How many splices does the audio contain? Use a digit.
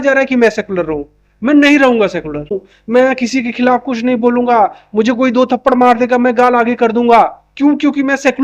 1